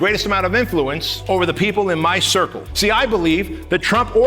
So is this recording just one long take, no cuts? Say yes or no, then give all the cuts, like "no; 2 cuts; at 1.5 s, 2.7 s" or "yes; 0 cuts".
no; 2 cuts; at 1.1 s, 2.6 s